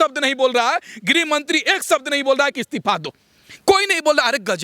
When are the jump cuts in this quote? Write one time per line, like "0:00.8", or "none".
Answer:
none

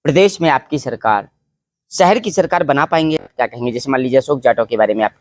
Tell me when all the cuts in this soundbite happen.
0:03.3

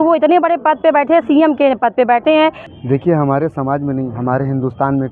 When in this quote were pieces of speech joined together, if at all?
0:02.7

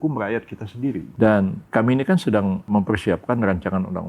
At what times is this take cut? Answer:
0:01.1
0:01.6
0:02.6

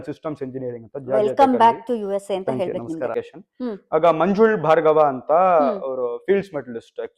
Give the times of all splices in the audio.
0:03.1

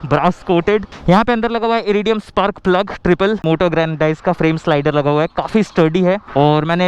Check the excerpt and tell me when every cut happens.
0:00.9
0:03.4

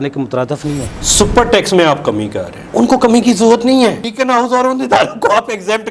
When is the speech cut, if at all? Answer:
0:00.9
0:04.0

